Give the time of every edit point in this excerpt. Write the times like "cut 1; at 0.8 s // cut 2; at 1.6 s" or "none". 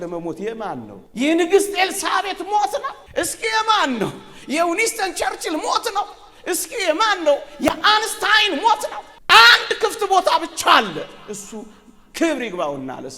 cut 1; at 1.0 s // cut 2; at 3.0 s // cut 3; at 9.1 s